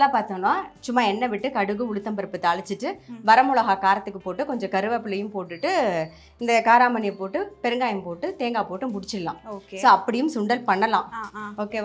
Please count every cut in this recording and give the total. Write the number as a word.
zero